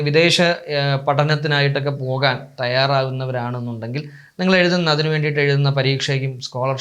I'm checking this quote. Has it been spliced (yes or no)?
no